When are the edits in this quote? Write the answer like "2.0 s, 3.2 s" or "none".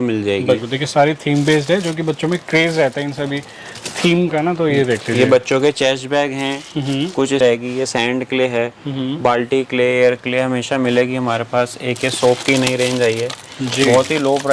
7.4 s